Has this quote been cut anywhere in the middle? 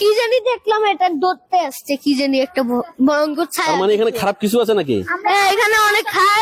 no; 0 cuts

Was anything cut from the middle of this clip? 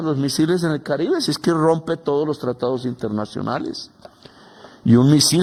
no; 0 cuts

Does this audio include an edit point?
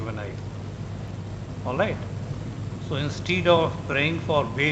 no; 0 cuts

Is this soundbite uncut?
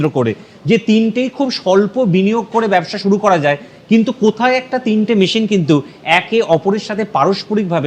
yes; 0 cuts

